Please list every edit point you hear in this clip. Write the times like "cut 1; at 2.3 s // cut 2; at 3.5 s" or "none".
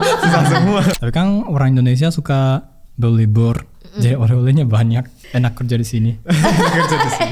cut 1; at 0.9 s // cut 2; at 5.2 s